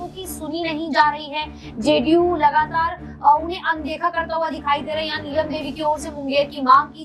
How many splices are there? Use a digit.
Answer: 0